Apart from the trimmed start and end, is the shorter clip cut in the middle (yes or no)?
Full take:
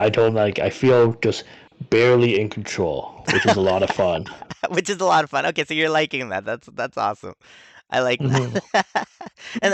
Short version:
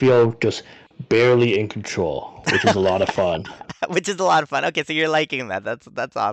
no